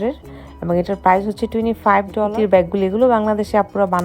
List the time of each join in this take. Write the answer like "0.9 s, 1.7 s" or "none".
2.3 s

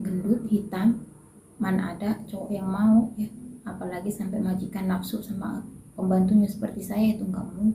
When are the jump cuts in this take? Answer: none

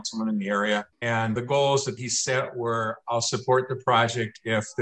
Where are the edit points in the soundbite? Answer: 0.9 s

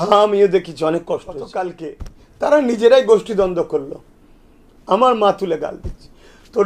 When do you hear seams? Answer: 1.7 s

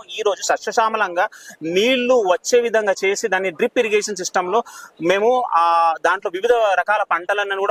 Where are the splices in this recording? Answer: none

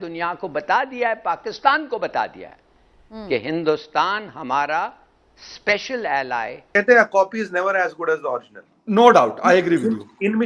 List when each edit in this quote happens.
6.8 s

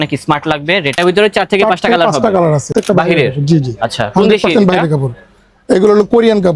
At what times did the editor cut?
1.0 s, 2.7 s

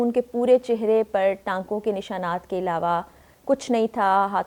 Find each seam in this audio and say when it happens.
none

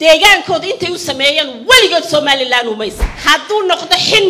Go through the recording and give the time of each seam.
3.1 s

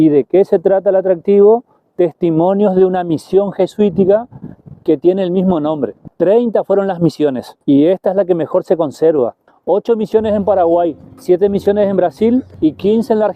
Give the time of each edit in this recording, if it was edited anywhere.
6.0 s, 7.5 s, 9.5 s, 11.1 s, 12.5 s

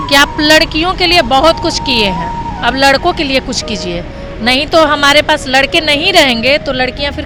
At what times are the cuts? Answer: none

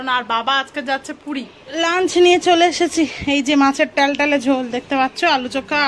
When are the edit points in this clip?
1.6 s

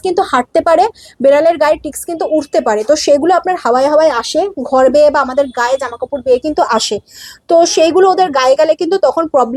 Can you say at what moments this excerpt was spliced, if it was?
none

